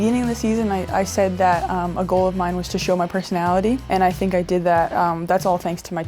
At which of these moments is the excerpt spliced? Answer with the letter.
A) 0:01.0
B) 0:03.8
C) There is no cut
B